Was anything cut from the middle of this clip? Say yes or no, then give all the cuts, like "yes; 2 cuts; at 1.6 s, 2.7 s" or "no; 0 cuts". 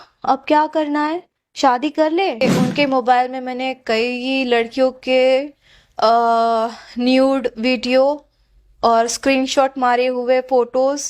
yes; 1 cut; at 2.4 s